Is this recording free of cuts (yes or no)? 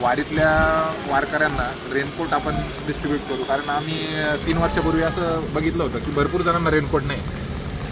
yes